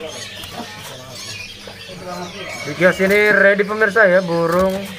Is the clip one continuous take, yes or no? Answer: yes